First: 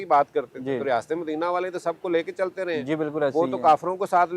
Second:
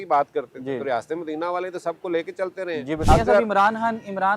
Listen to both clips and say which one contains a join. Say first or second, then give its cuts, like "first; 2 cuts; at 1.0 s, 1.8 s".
second; 1 cut; at 2.9 s